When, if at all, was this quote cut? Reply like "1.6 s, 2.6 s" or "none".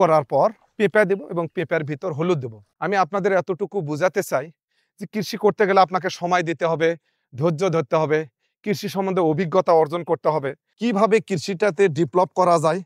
2.6 s, 10.7 s

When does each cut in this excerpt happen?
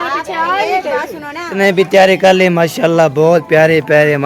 1.5 s

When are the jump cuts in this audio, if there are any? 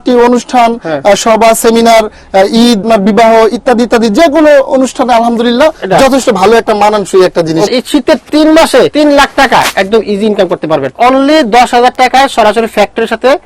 2.8 s, 7.7 s, 8.9 s, 11.0 s

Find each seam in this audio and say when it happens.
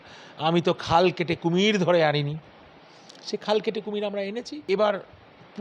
4.5 s

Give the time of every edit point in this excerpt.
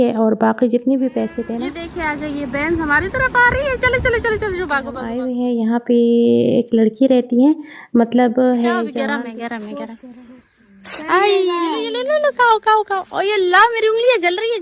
1.5 s, 5.2 s, 8.9 s, 11.9 s

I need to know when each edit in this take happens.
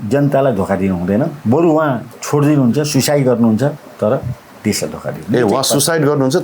1.4 s, 3.8 s

